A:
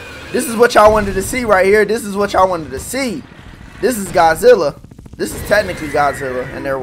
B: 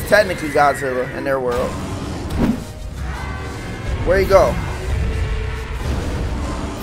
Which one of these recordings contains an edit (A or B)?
B